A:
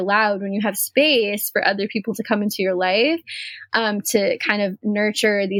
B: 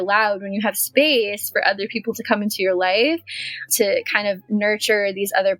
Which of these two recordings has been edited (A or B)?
B